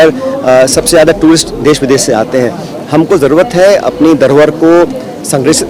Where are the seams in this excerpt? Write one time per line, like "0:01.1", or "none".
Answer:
none